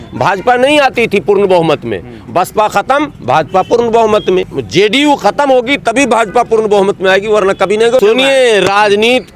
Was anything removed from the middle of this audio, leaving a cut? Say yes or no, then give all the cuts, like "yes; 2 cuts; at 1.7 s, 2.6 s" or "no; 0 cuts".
yes; 2 cuts; at 4.6 s, 8.0 s